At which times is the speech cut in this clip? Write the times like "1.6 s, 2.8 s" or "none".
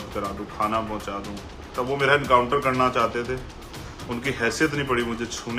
1.7 s